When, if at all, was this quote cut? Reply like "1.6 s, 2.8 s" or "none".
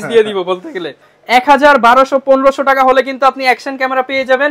1.1 s